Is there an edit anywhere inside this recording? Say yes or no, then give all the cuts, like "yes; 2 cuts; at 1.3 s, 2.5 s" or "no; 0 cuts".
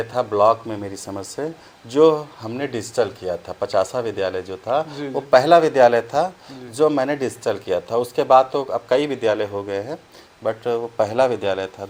no; 0 cuts